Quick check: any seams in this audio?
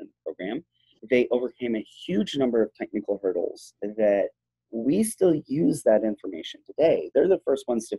yes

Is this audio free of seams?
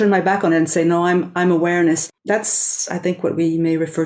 no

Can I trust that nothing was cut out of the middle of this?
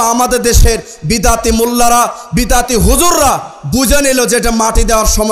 yes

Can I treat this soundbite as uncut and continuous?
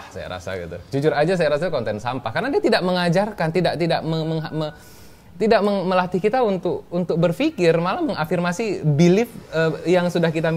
yes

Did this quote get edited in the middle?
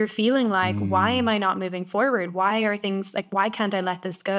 no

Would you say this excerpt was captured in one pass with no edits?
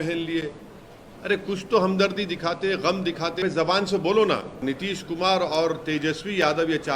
no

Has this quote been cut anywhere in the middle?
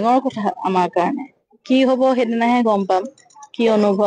yes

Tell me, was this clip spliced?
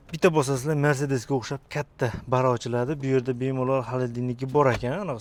no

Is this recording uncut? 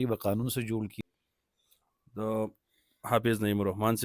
no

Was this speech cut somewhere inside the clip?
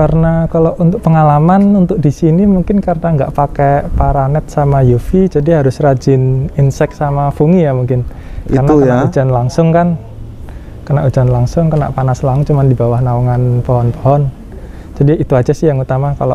no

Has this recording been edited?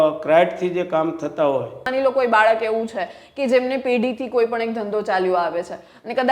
yes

